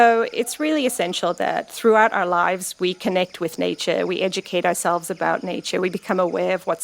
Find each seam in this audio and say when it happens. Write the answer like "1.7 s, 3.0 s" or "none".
1.7 s